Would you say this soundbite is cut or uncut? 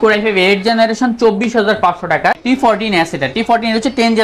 cut